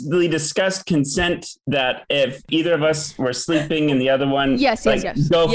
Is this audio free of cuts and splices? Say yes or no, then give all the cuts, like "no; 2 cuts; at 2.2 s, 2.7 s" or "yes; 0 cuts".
yes; 0 cuts